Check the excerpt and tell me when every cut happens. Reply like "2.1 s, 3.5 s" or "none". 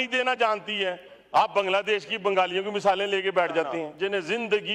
3.8 s